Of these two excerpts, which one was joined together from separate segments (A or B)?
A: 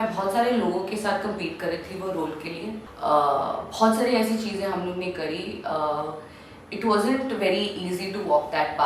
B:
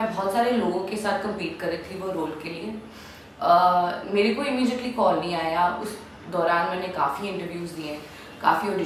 A